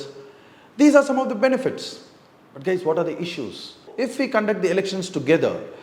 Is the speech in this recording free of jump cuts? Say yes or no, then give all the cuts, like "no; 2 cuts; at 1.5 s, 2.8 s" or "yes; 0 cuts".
no; 1 cut; at 3.8 s